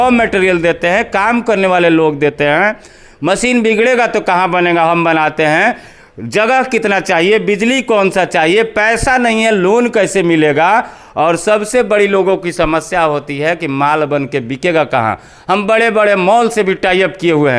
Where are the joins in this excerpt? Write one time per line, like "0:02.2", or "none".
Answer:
none